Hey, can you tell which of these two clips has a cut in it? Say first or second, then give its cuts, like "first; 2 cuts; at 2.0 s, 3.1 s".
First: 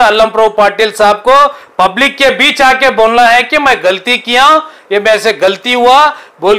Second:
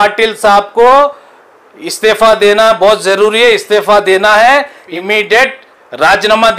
second; 1 cut; at 4.9 s